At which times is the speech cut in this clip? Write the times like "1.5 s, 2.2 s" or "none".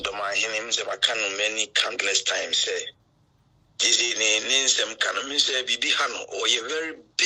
none